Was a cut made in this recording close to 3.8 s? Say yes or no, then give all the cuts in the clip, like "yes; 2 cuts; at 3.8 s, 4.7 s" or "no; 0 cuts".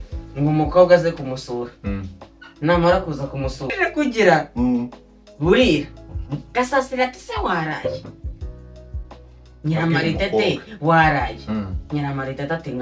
yes; 1 cut; at 3.8 s